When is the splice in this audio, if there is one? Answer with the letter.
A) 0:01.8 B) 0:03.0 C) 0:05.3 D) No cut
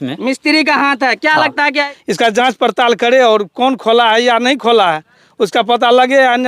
A